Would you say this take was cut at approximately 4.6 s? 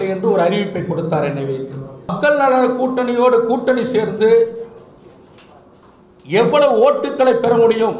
no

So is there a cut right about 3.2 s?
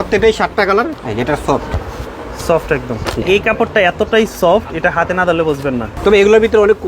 yes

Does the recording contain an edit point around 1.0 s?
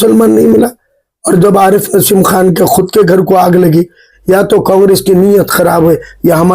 no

